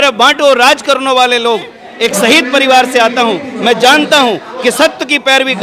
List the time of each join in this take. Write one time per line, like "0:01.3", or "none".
0:01.8